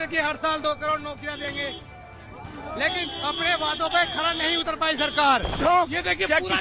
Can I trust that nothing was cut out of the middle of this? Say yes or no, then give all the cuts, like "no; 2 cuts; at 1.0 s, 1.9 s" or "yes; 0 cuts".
no; 1 cut; at 5.6 s